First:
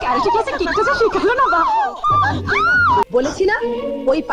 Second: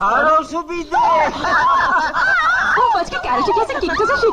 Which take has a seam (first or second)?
first